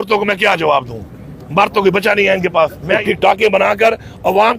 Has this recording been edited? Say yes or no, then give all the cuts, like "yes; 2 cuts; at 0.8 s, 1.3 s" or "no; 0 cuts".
yes; 1 cut; at 3.0 s